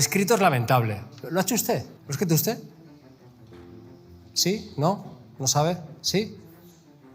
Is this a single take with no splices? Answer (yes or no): no